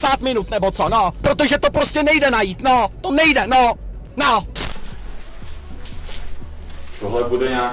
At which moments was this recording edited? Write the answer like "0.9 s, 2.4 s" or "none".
1.2 s, 4.7 s